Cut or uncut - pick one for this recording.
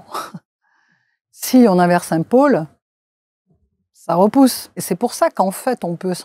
cut